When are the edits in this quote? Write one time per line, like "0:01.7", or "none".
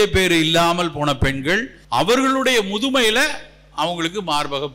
0:01.8